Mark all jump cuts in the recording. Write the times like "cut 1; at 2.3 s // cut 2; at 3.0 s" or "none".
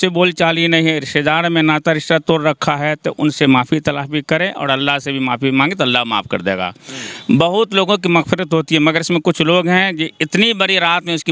none